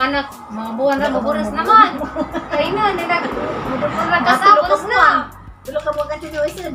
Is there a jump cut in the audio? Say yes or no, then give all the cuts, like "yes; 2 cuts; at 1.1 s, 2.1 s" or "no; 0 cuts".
yes; 1 cut; at 2.6 s